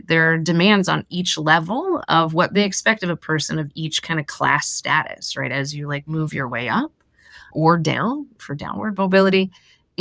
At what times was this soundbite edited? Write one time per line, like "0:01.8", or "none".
0:08.4

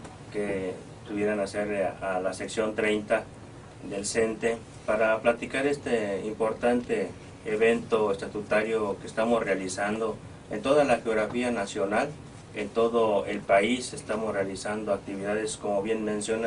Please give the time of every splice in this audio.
none

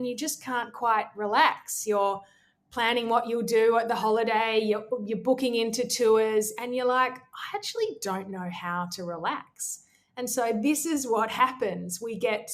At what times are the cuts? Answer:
none

